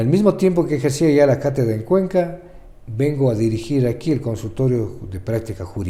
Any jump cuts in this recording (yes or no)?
no